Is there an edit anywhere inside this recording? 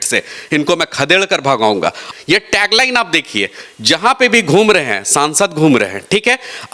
yes; 1 cut; at 2.0 s

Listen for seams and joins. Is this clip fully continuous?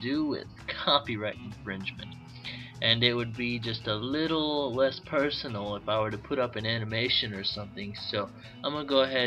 no; 1 cut; at 3.4 s

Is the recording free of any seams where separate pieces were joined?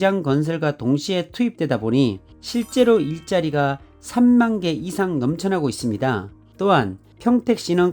no; 1 cut; at 6.4 s

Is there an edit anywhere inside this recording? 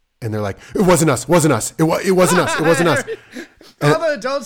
no; 0 cuts

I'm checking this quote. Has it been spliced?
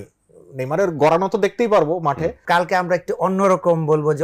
yes; 1 cut; at 2.4 s

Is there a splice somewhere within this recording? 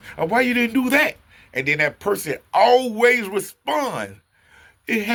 no; 0 cuts

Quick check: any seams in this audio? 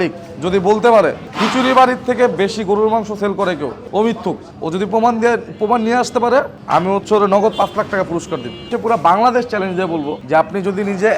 yes; 6 cuts; at 1.3 s, 3.8 s, 4.5 s, 6.6 s, 8.7 s, 10.2 s

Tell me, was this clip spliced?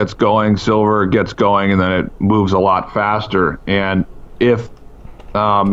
no; 0 cuts

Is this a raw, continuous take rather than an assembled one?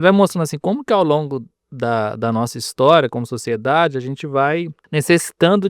no; 1 cut; at 4.8 s

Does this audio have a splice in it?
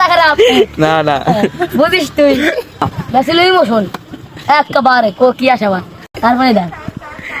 yes; 2 cuts; at 2.9 s, 6.0 s

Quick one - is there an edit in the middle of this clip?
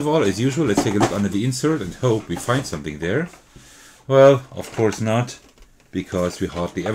no; 0 cuts

